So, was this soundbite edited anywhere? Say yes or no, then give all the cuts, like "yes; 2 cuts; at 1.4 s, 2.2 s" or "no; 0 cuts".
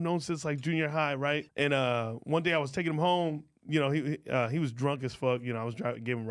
yes; 1 cut; at 1.5 s